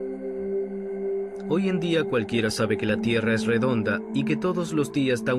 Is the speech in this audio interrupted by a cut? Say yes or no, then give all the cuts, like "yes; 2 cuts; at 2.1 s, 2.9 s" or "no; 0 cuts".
yes; 1 cut; at 2.0 s